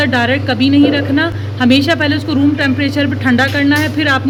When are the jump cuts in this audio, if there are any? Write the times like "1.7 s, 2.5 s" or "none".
none